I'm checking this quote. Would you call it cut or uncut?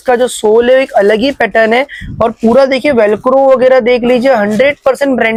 uncut